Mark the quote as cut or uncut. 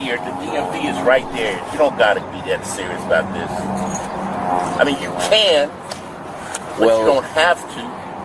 uncut